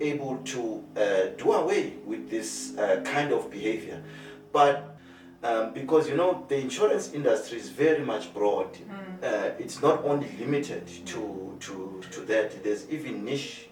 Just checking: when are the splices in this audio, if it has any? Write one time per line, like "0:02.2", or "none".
0:04.9